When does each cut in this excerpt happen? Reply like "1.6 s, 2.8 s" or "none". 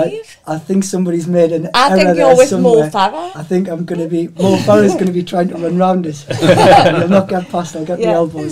none